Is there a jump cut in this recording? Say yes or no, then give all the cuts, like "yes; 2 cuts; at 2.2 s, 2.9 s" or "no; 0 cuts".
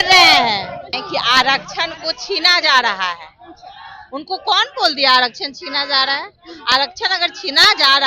yes; 1 cut; at 1.0 s